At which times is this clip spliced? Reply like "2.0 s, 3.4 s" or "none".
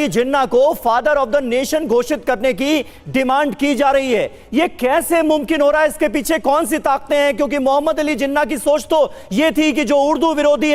none